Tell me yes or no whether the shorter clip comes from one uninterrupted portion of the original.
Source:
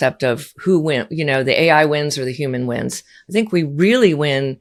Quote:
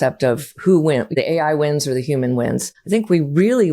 no